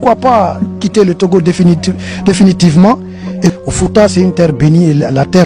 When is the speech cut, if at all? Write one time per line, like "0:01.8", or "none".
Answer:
0:03.5